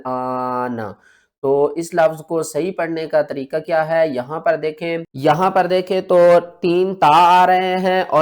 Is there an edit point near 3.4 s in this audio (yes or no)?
no